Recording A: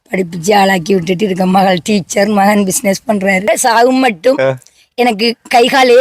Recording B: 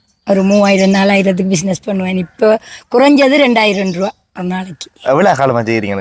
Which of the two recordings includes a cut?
A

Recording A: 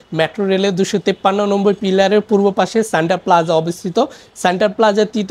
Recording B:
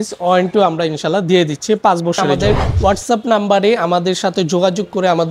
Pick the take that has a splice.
B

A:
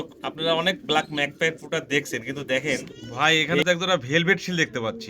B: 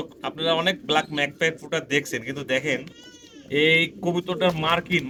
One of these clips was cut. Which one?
A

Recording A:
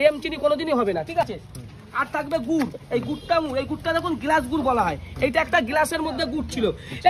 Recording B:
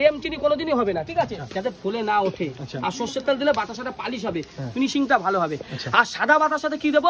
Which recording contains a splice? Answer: B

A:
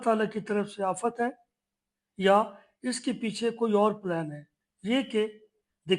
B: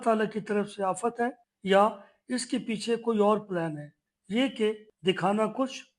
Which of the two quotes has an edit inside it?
B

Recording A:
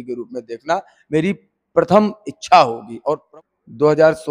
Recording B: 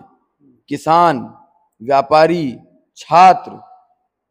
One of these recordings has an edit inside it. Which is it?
A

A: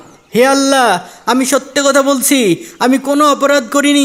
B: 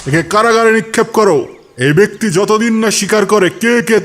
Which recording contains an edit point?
B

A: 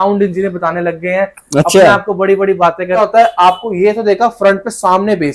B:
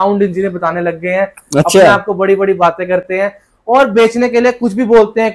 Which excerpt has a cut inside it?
A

